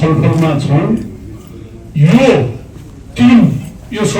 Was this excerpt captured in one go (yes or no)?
yes